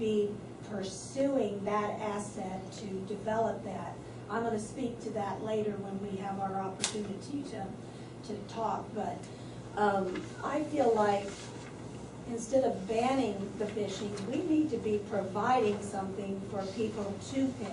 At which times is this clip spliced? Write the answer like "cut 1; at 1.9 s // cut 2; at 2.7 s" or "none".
none